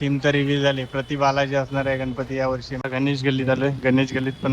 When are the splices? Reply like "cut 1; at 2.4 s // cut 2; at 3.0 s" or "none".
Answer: cut 1; at 2.7 s